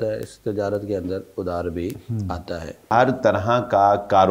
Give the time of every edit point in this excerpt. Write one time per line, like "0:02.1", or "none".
0:02.9